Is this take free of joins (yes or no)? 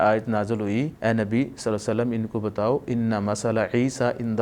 no